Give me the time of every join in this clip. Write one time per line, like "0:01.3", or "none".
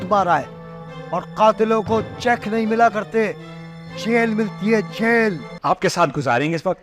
0:05.5